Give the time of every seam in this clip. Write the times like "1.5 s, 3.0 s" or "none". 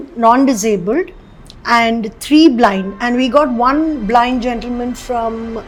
none